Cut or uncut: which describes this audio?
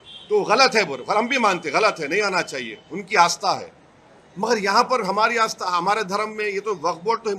uncut